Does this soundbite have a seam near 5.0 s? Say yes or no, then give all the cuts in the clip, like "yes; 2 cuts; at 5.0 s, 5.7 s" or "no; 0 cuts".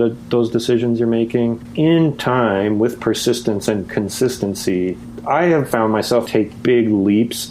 no; 2 cuts; at 1.6 s, 6.2 s